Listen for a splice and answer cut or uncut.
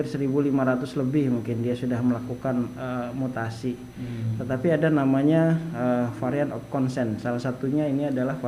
uncut